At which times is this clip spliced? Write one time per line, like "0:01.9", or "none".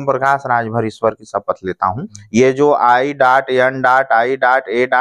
0:02.1